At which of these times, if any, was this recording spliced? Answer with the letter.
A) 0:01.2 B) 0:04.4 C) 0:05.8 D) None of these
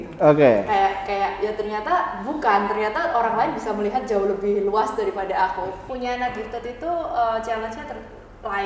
C